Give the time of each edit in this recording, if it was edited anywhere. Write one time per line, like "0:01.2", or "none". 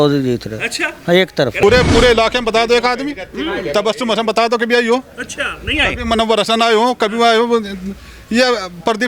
0:01.6